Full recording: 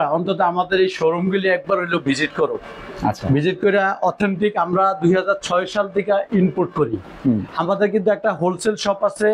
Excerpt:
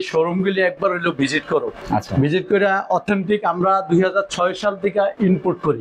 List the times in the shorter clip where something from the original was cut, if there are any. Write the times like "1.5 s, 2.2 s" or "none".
1.8 s

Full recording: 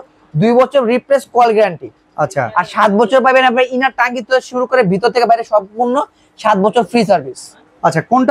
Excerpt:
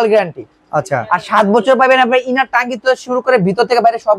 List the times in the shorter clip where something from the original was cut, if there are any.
none

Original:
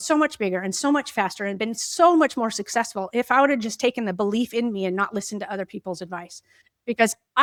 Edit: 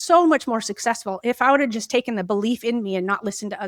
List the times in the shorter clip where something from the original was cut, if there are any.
none

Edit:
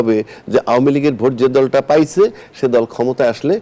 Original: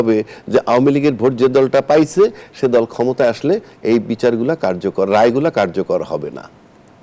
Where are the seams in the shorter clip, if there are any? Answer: none

